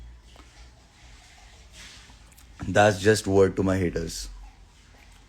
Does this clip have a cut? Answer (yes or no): no